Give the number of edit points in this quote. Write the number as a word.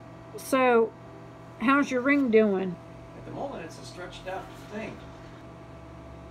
one